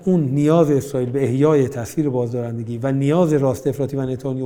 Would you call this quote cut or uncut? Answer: uncut